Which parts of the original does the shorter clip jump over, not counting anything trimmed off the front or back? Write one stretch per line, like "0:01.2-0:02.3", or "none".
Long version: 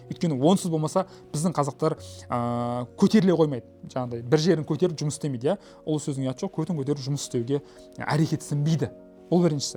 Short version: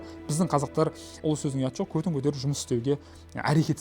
0:02.1-0:05.7